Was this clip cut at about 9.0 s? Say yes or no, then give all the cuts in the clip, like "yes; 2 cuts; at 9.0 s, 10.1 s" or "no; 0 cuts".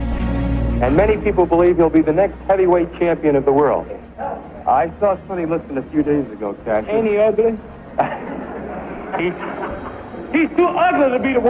yes; 1 cut; at 9.0 s